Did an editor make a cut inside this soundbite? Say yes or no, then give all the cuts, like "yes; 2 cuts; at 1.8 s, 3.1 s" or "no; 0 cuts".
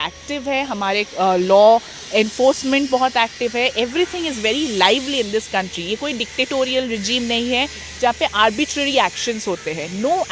no; 0 cuts